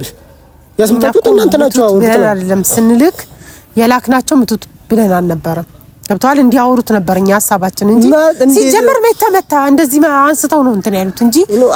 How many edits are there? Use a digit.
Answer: 0